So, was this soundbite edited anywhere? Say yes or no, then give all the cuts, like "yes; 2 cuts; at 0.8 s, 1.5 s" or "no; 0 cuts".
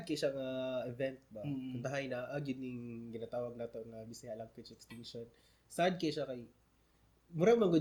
no; 0 cuts